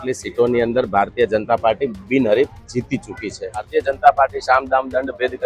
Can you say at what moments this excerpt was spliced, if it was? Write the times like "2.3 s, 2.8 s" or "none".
3.7 s